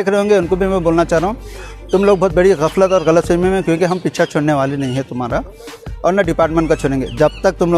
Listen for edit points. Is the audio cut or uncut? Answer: uncut